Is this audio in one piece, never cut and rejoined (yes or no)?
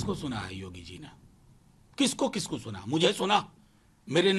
yes